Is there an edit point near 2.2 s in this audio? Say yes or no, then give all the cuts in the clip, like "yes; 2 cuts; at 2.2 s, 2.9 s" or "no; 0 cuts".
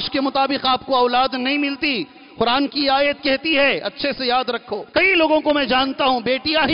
no; 1 cut; at 4.8 s